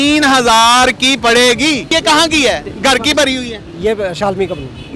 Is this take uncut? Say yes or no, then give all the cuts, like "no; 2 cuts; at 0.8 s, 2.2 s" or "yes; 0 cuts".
no; 1 cut; at 1.9 s